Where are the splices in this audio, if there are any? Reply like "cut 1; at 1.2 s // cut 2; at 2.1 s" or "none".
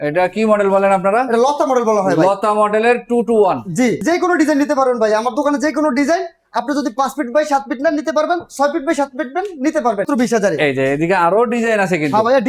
cut 1; at 4.0 s // cut 2; at 10.1 s